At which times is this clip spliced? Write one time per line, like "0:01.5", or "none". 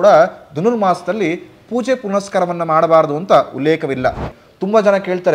0:04.3